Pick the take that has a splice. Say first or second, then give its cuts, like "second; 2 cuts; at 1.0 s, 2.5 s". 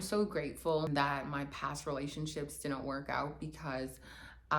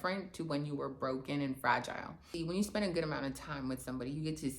second; 1 cut; at 2.2 s